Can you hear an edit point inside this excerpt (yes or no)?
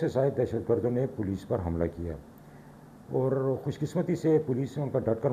no